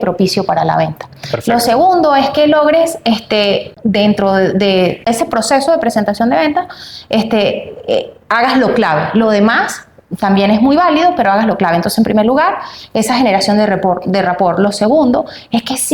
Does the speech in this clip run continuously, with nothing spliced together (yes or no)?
no